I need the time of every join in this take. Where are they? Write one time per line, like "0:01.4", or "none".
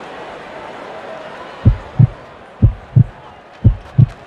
0:01.5